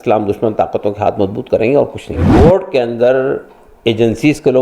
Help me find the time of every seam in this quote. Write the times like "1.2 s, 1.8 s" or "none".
2.3 s